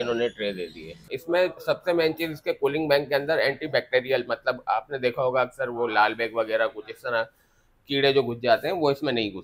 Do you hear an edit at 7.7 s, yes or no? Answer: no